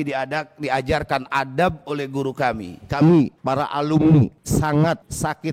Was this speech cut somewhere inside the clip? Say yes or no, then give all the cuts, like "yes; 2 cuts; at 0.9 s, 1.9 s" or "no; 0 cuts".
yes; 1 cut; at 2.7 s